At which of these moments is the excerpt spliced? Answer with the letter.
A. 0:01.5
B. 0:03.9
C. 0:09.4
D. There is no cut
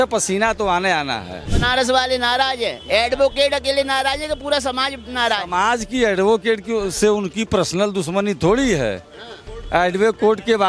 A